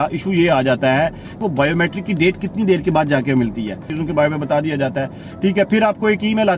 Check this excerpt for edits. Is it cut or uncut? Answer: cut